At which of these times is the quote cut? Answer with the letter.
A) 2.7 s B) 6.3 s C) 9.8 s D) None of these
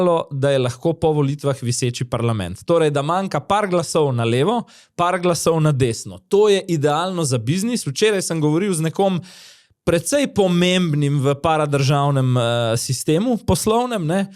D